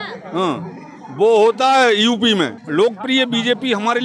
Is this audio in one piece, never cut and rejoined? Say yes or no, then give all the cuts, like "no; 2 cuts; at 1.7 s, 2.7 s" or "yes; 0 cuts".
no; 1 cut; at 2.6 s